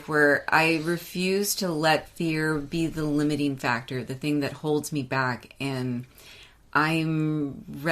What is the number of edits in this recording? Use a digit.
0